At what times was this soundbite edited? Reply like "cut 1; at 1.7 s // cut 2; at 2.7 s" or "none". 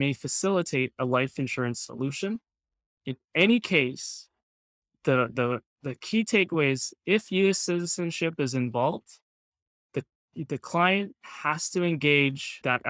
none